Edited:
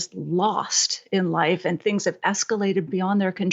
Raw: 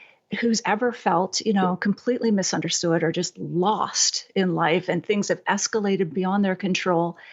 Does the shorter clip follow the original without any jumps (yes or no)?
yes